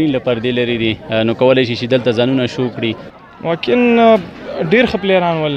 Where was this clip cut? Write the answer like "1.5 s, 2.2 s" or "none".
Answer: 3.0 s